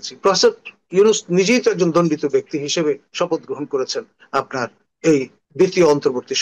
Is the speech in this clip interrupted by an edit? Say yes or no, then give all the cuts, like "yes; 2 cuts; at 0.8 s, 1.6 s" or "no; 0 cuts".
yes; 1 cut; at 5.4 s